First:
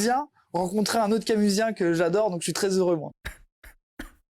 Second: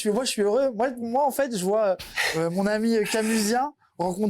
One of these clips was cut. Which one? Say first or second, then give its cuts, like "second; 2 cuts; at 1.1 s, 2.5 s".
first; 1 cut; at 3.0 s